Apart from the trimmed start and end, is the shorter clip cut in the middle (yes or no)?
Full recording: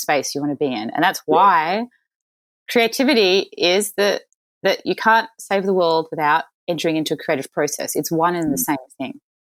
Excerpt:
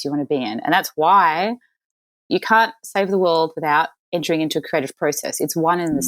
yes